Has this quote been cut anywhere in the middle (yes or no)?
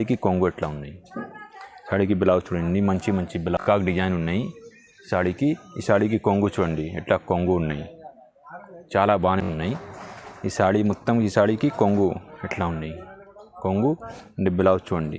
yes